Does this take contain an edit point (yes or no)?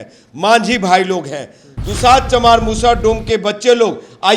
yes